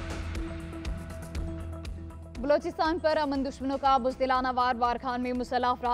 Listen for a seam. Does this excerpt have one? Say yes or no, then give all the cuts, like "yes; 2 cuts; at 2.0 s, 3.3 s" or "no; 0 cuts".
no; 0 cuts